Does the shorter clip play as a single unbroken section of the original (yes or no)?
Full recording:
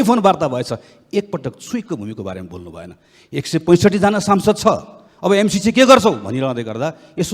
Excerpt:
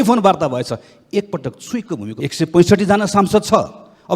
no